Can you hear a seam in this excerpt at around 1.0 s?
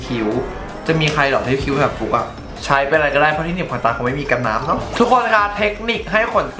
no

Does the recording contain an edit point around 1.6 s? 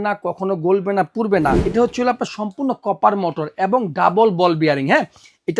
yes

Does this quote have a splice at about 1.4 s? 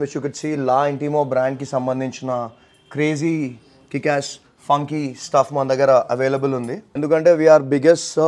no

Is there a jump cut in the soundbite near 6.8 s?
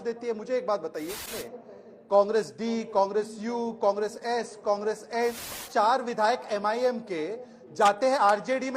no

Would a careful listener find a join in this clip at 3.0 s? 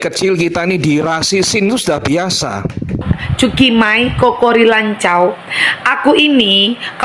yes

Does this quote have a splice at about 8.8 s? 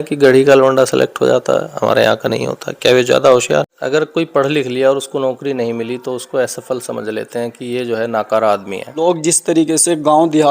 yes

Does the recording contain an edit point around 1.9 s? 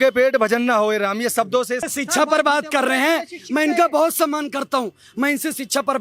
yes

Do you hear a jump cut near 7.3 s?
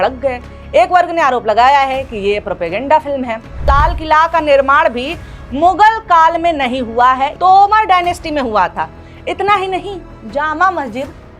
yes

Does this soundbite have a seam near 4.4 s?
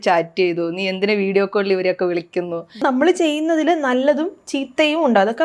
no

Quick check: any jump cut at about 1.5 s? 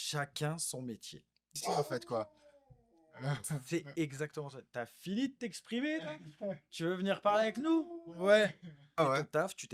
yes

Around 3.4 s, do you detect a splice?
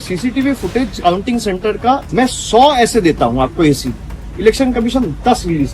no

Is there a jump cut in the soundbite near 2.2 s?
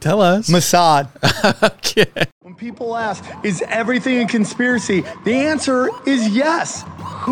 yes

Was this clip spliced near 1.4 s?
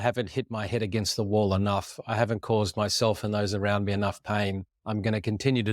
no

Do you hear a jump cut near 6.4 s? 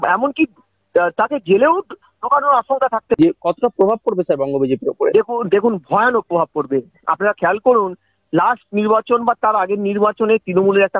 no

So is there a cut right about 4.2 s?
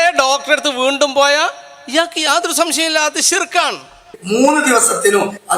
yes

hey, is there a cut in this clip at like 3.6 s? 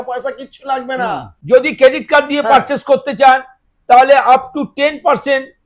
no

